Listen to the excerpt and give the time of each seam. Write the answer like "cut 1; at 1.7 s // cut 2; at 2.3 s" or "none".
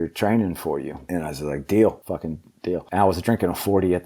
cut 1; at 1.0 s // cut 2; at 2.5 s